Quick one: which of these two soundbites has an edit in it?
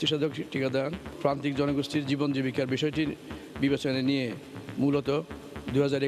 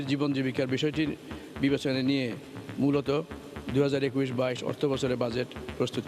first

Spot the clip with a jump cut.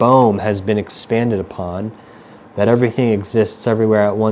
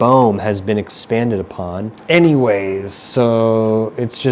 second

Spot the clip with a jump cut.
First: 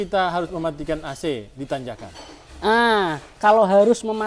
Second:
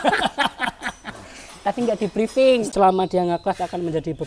second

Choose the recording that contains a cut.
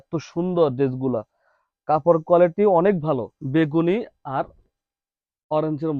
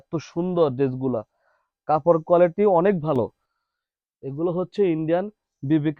first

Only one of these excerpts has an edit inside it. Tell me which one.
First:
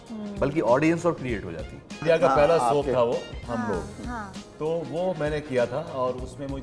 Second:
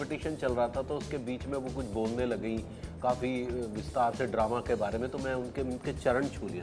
first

